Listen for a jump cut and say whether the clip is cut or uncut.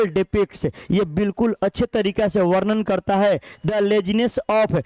uncut